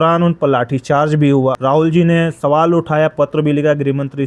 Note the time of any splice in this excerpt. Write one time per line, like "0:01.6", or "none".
0:01.6